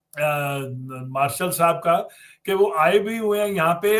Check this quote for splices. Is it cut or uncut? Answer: uncut